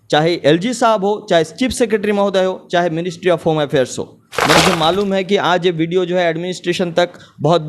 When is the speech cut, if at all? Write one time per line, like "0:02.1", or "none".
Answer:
0:04.6